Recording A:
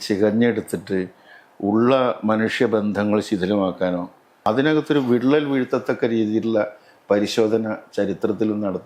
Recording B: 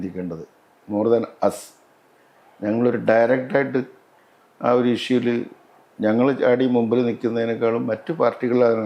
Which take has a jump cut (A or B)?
A